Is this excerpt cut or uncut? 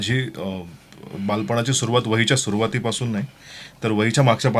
uncut